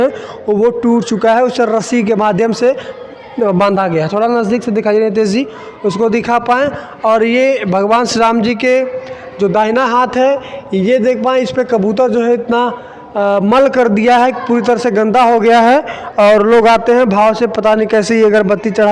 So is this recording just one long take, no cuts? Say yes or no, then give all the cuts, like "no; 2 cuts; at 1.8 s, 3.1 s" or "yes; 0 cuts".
yes; 0 cuts